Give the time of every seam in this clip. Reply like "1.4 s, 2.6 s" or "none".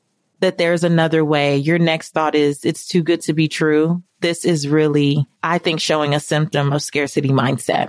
5.3 s